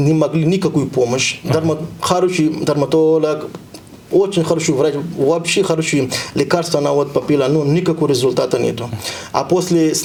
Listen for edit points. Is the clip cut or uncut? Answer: uncut